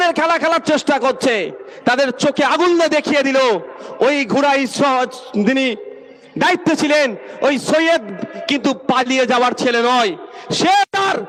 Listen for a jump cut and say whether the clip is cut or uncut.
uncut